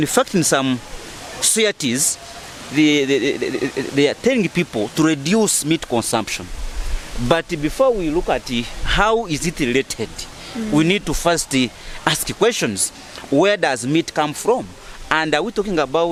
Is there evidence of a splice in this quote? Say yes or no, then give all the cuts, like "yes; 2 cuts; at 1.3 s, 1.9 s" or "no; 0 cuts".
no; 0 cuts